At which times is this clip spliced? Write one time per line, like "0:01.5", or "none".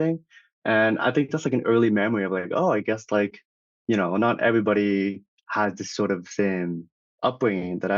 0:07.0